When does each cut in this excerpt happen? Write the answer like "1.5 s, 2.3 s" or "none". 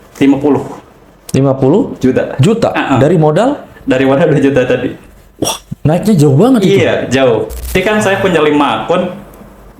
7.7 s